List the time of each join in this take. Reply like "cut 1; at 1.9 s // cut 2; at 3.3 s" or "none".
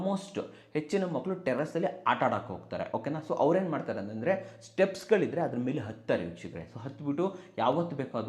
none